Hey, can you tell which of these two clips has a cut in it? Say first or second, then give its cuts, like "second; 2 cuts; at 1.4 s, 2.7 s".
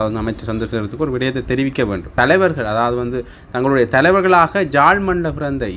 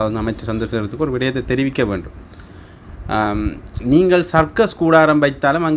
first; 1 cut; at 2.1 s